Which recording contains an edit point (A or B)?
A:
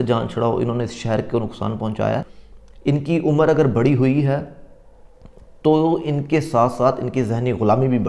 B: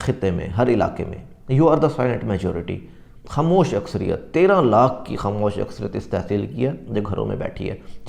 A